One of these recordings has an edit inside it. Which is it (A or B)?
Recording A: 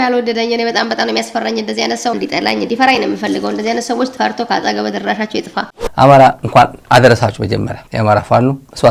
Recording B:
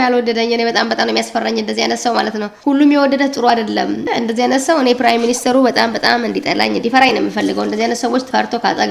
A